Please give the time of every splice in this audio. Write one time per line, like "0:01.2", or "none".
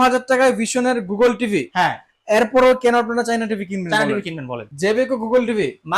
0:04.6